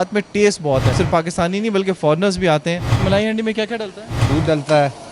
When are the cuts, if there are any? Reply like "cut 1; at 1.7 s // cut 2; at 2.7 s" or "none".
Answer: cut 1; at 0.9 s // cut 2; at 2.9 s // cut 3; at 4.3 s

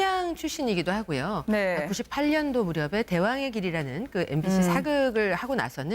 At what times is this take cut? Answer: cut 1; at 3.5 s

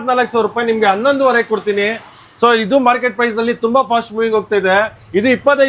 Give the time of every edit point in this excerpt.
none

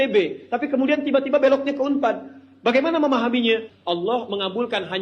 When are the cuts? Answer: cut 1; at 3.7 s

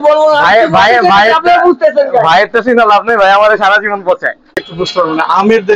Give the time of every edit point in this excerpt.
cut 1; at 4.6 s

